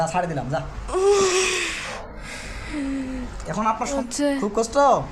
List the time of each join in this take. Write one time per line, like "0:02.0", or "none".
0:04.0